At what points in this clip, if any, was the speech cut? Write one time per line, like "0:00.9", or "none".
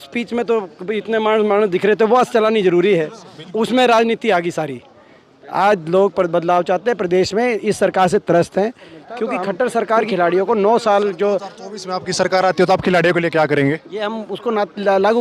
0:10.1